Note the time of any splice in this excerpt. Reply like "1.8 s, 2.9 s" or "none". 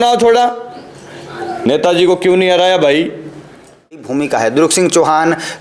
4.1 s